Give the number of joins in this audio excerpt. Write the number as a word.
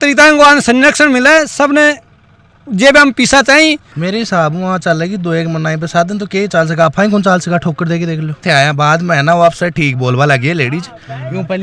two